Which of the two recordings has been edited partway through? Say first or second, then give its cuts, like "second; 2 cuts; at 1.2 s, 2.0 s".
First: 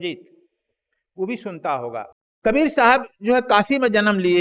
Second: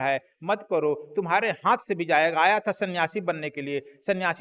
first; 1 cut; at 2.2 s